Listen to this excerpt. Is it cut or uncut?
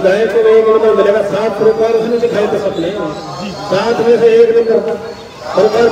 uncut